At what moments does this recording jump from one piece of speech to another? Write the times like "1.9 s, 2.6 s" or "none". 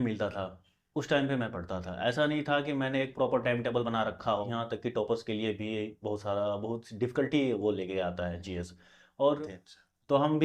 4.5 s, 9.4 s